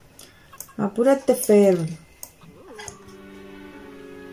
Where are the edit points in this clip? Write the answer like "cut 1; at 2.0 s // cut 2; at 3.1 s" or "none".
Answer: cut 1; at 2.9 s